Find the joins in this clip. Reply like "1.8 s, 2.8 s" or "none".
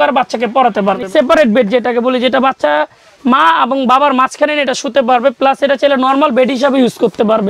1.0 s